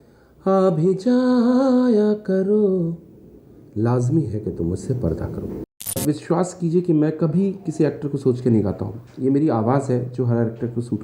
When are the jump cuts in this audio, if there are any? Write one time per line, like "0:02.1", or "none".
0:05.9